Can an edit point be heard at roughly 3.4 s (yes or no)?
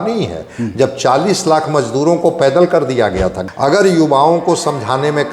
yes